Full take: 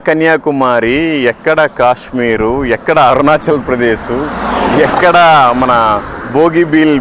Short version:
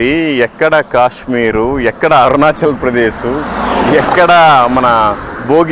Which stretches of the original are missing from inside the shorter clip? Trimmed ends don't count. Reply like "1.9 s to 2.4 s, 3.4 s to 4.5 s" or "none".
none